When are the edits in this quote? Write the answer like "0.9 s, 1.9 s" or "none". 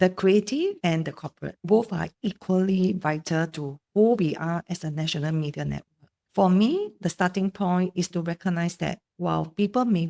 0.9 s